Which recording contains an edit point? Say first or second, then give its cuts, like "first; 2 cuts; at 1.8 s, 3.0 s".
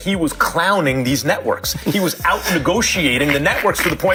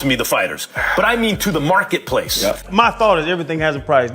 second; 1 cut; at 2.7 s